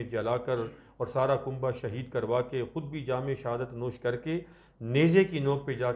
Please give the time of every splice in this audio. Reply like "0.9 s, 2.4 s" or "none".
none